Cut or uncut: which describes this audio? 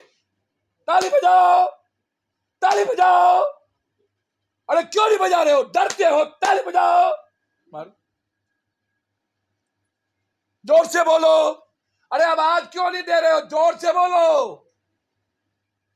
uncut